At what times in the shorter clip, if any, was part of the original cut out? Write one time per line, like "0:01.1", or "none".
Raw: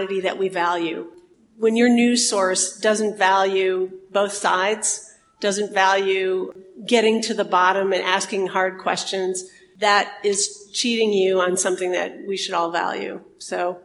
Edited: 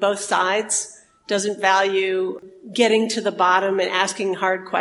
none